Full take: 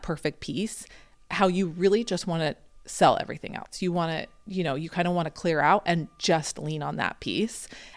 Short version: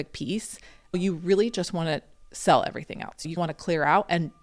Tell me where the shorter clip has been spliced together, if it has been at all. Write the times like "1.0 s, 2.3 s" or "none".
0.9 s, 3.3 s